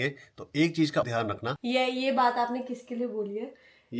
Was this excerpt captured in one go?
no; 1 cut; at 1.2 s

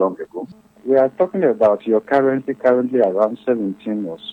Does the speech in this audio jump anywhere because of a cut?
no; 0 cuts

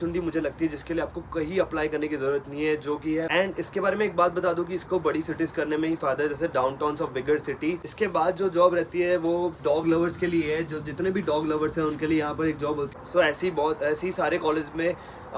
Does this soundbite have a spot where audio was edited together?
yes; 3 cuts; at 3.3 s, 7.9 s, 12.9 s

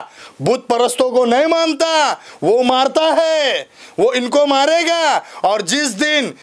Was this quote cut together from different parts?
no; 0 cuts

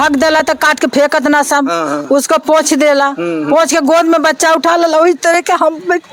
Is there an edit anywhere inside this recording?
no; 0 cuts

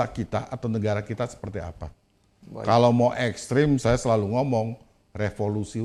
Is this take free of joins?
yes; 0 cuts

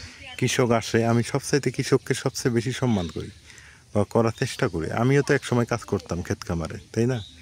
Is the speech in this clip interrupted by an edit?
no; 0 cuts

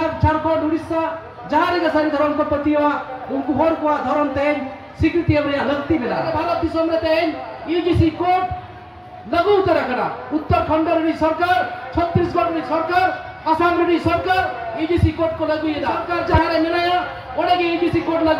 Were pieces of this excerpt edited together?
yes; 2 cuts; at 6.3 s, 16.0 s

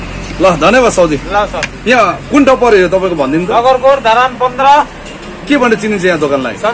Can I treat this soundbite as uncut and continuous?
yes; 0 cuts

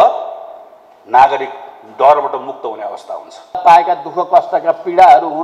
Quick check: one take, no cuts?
no; 1 cut; at 3.6 s

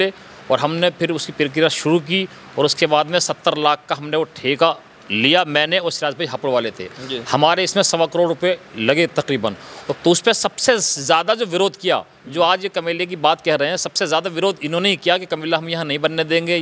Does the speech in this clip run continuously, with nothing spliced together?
no; 1 cut; at 9.8 s

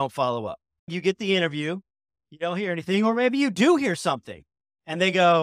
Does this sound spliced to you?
yes; 2 cuts; at 0.9 s, 2.2 s

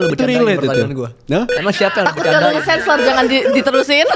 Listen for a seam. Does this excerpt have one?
no; 0 cuts

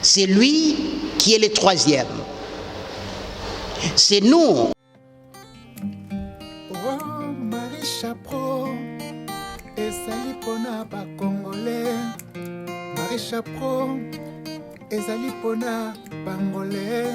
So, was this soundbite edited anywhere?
yes; 1 cut; at 4.7 s

